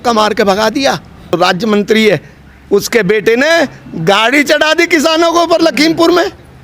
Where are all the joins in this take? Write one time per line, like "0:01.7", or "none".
0:01.3